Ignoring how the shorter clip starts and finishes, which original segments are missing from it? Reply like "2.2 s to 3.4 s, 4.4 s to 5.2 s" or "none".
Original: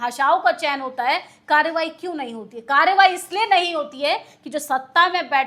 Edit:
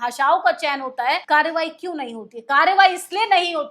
1.2 s to 1.4 s